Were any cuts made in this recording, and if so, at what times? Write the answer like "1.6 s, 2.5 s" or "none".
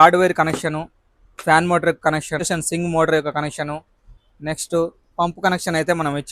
none